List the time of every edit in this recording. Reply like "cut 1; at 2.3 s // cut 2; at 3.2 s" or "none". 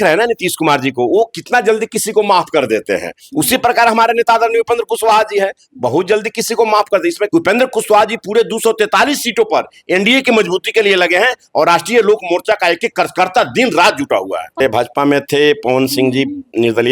cut 1; at 7.2 s // cut 2; at 14.6 s

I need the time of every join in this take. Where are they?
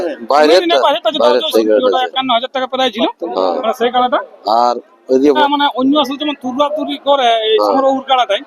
cut 1; at 1.5 s // cut 2; at 5.4 s

